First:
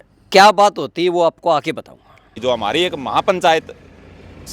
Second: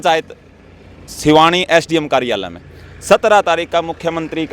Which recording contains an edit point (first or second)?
first